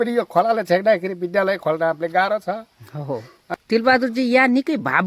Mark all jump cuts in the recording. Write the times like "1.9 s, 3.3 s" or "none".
3.5 s